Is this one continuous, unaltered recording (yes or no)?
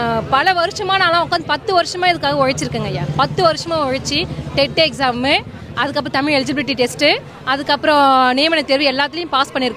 yes